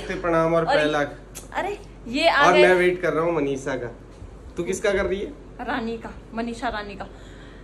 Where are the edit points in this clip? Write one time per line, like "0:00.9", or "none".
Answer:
none